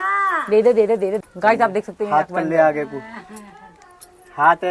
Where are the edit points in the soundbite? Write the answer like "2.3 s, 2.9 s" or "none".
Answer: 1.2 s